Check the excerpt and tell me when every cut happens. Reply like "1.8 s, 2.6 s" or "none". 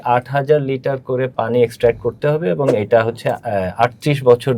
none